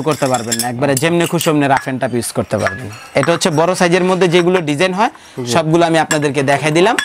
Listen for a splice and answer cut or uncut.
uncut